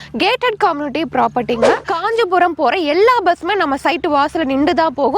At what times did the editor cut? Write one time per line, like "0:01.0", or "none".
0:01.9